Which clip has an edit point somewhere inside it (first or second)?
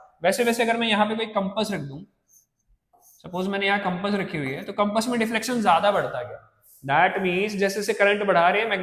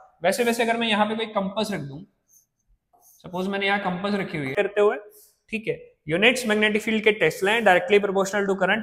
second